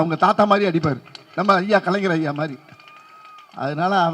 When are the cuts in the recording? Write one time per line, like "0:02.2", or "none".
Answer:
none